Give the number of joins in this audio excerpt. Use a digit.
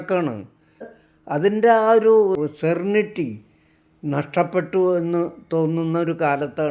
2